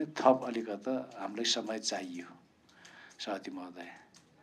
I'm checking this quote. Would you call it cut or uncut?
uncut